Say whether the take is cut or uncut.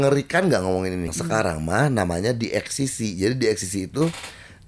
cut